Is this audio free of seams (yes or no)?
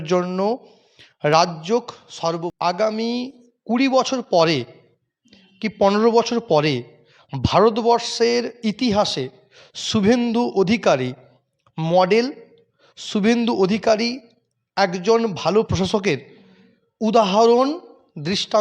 no